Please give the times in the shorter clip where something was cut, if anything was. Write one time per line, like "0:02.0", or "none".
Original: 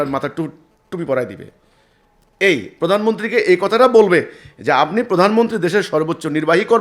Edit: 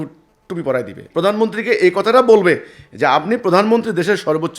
0:01.0